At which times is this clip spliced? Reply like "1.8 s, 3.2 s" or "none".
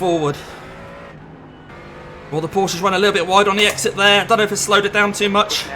1.7 s